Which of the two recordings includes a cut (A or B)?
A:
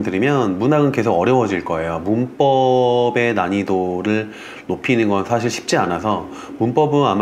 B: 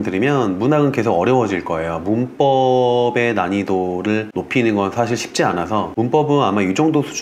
B